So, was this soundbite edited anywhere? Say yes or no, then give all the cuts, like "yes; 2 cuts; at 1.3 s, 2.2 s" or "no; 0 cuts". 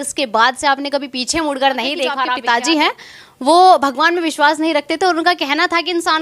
yes; 1 cut; at 2.4 s